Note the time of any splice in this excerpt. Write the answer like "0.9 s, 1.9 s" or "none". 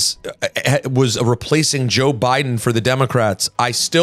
none